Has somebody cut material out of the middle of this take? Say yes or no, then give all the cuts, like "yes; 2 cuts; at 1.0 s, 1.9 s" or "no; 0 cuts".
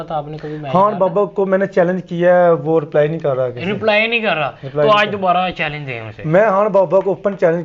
no; 0 cuts